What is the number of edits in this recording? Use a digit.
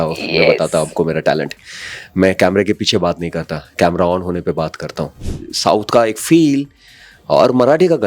1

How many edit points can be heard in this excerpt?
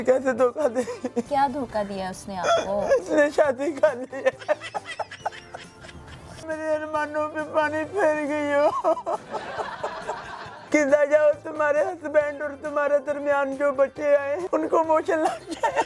5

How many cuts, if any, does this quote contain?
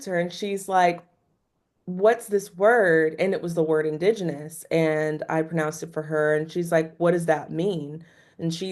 0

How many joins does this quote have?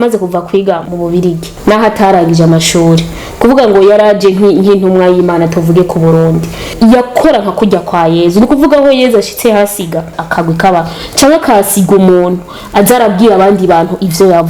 3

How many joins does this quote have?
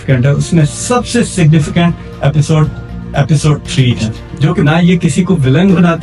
1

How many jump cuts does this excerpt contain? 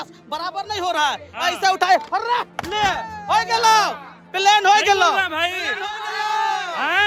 0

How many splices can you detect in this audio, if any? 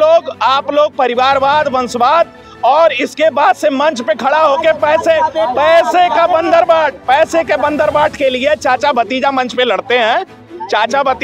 0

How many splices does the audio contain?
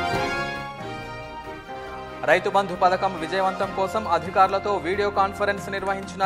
1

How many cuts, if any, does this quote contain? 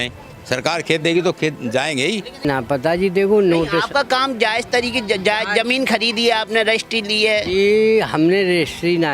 1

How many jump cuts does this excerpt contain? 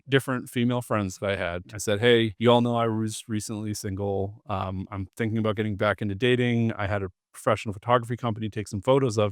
2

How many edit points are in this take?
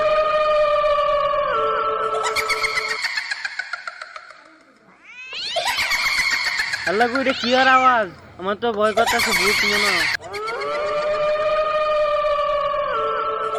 1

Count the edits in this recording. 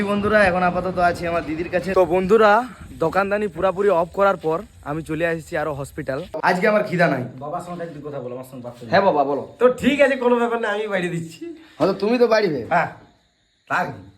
2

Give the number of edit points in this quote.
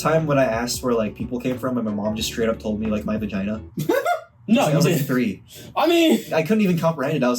2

